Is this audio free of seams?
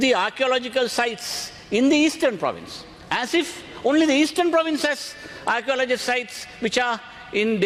yes; 0 cuts

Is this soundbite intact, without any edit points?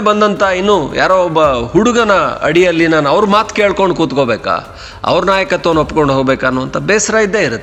yes; 0 cuts

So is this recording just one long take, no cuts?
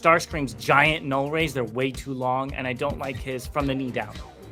yes; 0 cuts

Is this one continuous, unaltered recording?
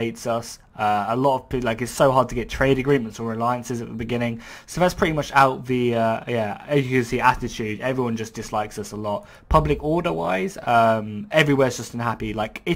no; 1 cut; at 3.1 s

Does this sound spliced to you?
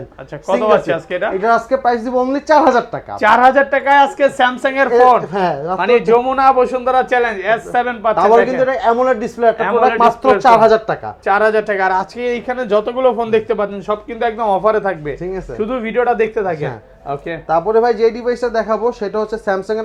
no; 0 cuts

